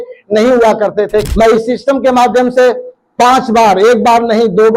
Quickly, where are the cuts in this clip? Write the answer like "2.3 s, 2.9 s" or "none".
1.3 s